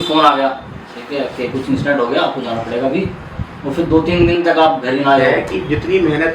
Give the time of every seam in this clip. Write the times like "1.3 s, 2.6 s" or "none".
5.3 s

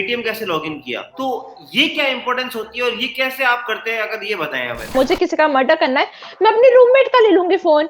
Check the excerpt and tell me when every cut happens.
4.9 s

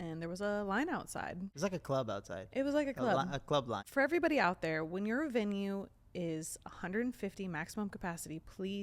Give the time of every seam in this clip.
1.5 s, 3.8 s

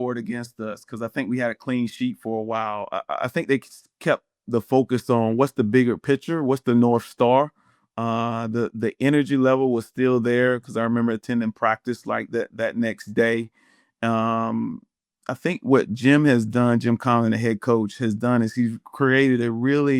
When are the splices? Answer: none

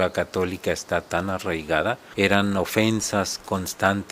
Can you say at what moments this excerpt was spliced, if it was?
2.0 s

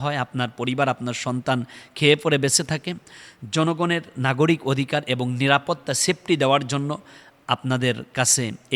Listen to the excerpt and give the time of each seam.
none

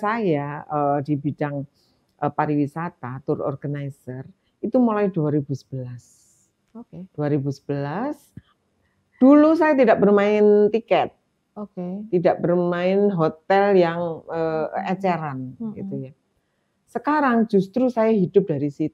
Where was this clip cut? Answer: none

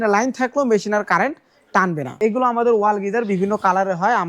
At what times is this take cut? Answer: 2.2 s

